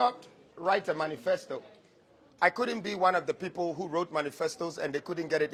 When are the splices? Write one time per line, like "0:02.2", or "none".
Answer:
none